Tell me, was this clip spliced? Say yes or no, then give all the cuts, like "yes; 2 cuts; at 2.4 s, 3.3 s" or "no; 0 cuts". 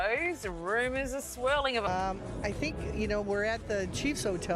yes; 1 cut; at 1.8 s